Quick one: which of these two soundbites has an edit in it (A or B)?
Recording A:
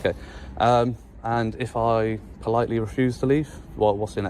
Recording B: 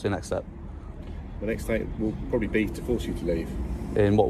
A